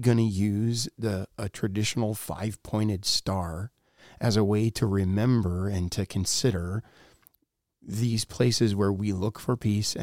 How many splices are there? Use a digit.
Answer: 0